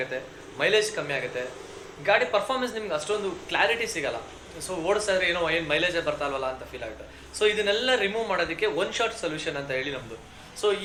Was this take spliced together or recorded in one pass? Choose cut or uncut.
uncut